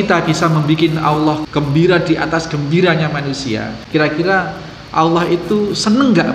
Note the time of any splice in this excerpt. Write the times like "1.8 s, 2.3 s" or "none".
1.4 s, 3.8 s